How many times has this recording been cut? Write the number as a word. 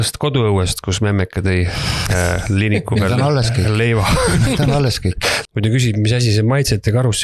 one